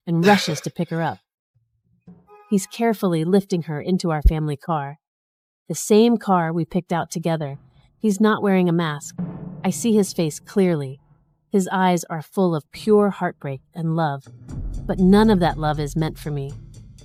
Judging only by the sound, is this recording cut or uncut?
uncut